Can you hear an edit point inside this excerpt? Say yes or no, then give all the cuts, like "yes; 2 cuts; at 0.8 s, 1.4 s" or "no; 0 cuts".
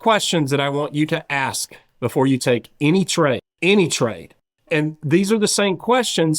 yes; 1 cut; at 3.5 s